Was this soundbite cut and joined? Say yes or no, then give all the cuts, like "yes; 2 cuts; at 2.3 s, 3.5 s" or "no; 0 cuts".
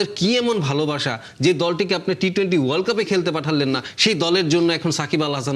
no; 0 cuts